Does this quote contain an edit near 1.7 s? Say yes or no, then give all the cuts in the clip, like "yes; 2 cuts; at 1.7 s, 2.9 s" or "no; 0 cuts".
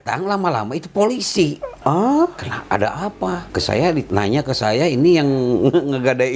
yes; 3 cuts; at 1.7 s, 2.5 s, 4.0 s